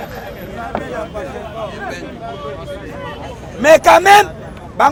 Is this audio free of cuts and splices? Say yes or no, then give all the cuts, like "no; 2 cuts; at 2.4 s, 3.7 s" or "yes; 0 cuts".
yes; 0 cuts